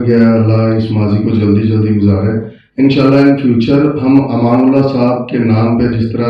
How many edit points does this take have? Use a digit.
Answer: 0